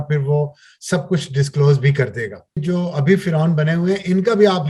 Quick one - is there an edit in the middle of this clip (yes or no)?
yes